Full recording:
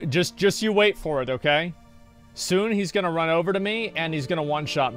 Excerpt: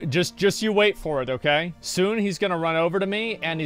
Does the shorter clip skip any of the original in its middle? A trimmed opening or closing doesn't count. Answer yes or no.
yes